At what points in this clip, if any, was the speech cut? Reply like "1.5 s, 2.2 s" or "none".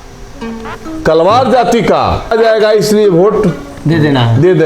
2.3 s